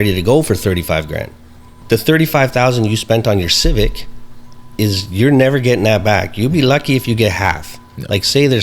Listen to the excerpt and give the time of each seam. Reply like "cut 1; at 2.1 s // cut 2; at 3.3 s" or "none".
cut 1; at 1.7 s